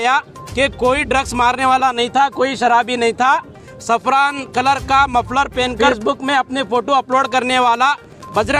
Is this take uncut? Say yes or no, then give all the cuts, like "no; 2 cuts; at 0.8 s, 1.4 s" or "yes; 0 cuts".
no; 1 cut; at 5.8 s